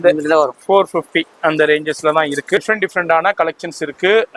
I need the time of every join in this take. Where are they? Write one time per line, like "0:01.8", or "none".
0:02.6